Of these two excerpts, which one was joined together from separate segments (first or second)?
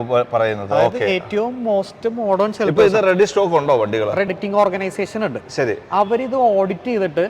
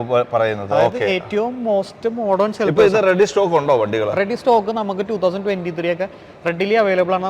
first